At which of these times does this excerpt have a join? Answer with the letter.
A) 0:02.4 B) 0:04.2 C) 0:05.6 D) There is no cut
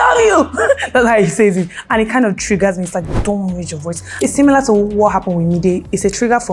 B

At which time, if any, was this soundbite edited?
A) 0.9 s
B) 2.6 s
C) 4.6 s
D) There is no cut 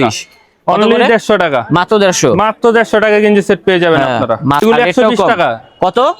C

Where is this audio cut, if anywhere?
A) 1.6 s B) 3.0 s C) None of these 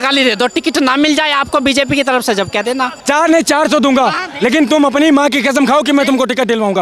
B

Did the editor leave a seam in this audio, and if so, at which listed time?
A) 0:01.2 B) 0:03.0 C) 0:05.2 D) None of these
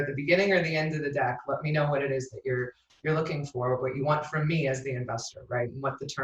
D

